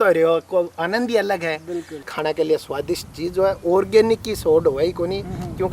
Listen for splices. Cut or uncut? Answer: cut